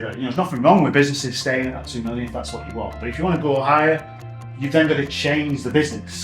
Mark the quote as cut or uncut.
uncut